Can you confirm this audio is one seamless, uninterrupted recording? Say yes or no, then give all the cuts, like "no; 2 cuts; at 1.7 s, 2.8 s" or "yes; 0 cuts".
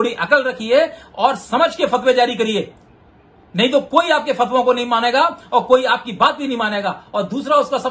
yes; 0 cuts